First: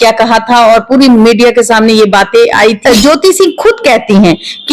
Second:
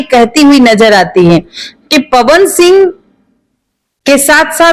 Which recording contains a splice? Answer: first; 1 cut; at 2.8 s

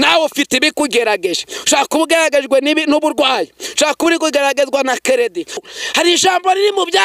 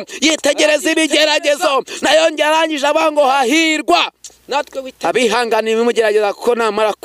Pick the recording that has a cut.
first; 1 cut; at 5.6 s

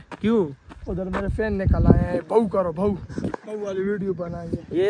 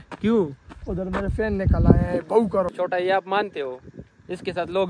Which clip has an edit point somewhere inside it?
second; 1 cut; at 2.7 s

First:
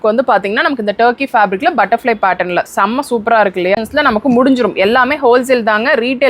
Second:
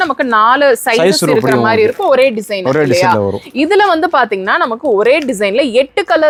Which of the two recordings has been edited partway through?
first; 1 cut; at 3.8 s

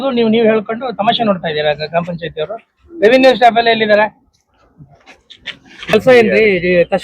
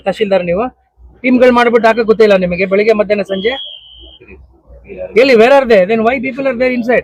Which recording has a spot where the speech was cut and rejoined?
first; 1 cut; at 5.9 s

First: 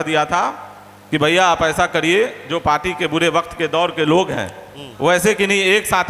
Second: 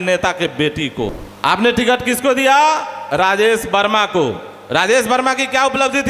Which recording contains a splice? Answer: second; 1 cut; at 1.2 s

